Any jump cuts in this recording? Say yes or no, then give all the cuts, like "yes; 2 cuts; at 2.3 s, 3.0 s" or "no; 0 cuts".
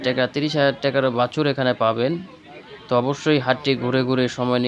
no; 0 cuts